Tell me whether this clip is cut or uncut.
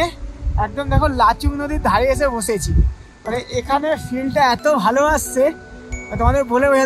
uncut